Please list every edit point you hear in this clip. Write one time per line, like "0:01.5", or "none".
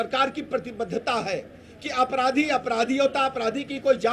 none